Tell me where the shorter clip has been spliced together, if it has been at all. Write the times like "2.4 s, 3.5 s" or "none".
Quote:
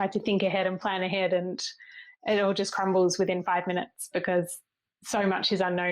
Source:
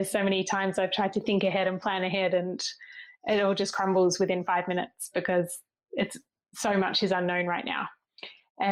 4.7 s